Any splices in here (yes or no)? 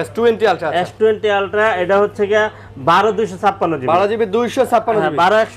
no